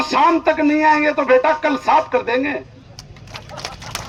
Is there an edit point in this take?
no; 0 cuts

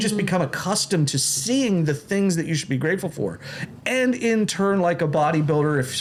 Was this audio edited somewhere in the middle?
no; 0 cuts

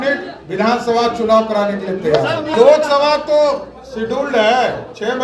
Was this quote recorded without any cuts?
no; 1 cut; at 2.5 s

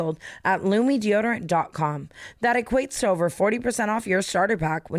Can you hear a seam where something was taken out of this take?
no; 0 cuts

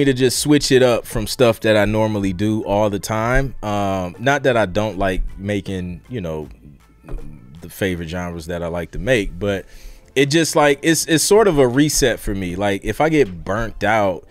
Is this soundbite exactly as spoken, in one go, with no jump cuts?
yes; 0 cuts

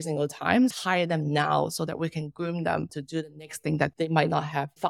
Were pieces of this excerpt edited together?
yes; 2 cuts; at 0.7 s, 3.9 s

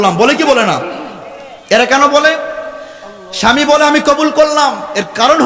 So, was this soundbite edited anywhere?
no; 0 cuts

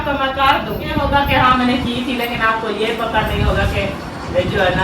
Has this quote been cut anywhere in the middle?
yes; 1 cut; at 0.9 s

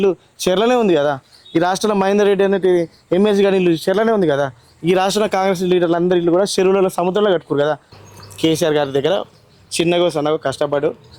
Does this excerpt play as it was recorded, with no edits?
no; 1 cut; at 7.9 s

